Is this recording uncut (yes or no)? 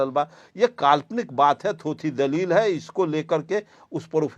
yes